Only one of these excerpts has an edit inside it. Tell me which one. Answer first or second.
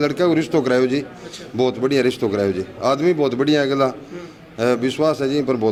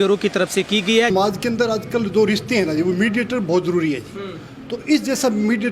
second